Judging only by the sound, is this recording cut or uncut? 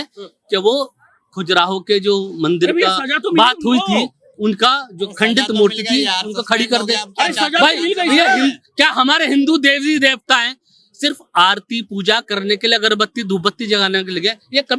uncut